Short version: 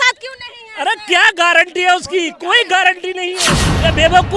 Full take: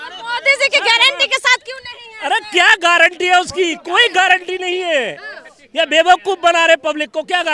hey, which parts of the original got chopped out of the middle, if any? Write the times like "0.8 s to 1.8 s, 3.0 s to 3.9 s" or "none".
4.9 s to 5.4 s

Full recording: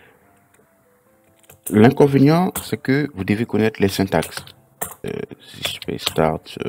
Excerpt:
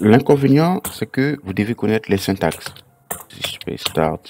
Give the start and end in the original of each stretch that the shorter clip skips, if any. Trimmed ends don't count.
4.9 s to 5.4 s

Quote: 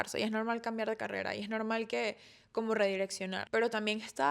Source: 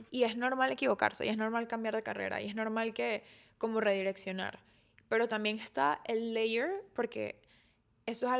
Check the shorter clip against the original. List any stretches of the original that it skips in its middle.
4.4 s to 5.0 s

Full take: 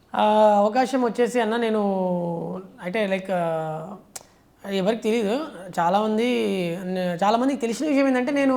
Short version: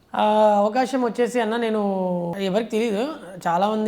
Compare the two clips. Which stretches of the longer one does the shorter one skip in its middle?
2.3 s to 4.6 s

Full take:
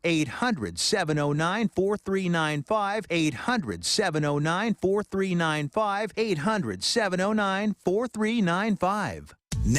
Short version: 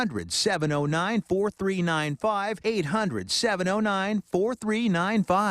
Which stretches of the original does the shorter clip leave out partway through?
3.0 s to 6.1 s

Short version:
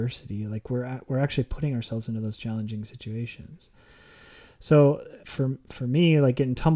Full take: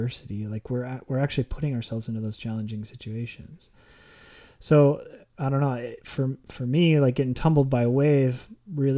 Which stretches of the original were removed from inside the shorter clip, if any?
5.2 s to 6.0 s

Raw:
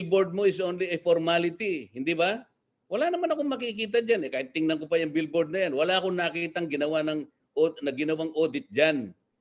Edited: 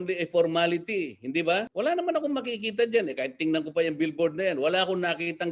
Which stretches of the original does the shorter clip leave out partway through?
2.4 s to 2.8 s

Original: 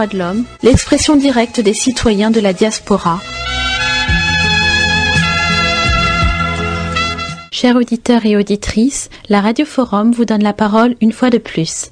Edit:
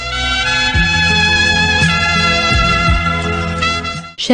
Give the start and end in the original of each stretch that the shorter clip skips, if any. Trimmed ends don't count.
none

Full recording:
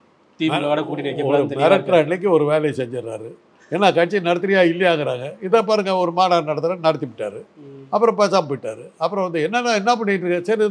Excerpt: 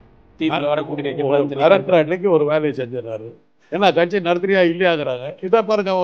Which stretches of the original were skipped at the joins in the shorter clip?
none

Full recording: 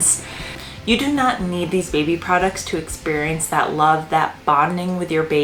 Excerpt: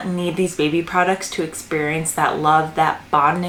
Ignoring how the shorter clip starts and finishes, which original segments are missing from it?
none

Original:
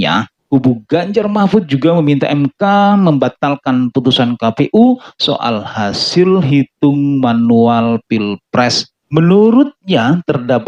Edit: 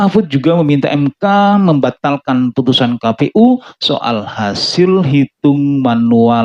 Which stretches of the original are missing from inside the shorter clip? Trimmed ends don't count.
none

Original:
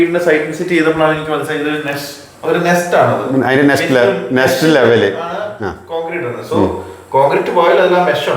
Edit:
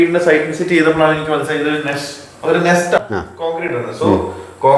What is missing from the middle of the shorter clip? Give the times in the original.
3.0 s to 5.5 s

